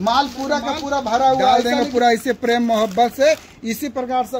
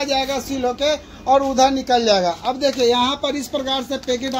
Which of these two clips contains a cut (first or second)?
first